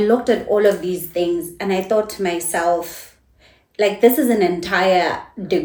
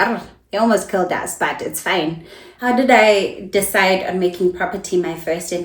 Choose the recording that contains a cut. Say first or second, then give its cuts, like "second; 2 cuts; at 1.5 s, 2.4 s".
second; 1 cut; at 2.5 s